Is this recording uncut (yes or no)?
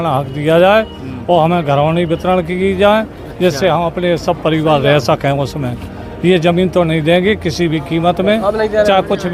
yes